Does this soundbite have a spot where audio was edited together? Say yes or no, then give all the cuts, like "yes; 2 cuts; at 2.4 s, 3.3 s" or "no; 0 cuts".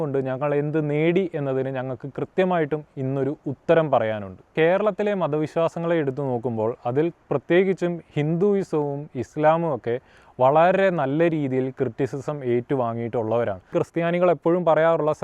yes; 2 cuts; at 4.5 s, 13.7 s